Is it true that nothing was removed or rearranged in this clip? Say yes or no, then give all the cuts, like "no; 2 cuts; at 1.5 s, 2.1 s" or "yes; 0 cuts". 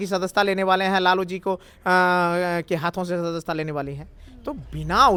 yes; 0 cuts